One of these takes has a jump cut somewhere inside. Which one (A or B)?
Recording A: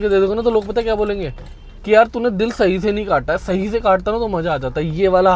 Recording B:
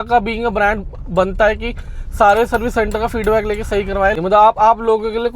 B